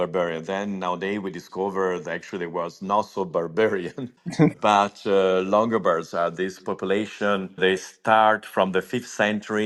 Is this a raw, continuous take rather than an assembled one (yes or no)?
yes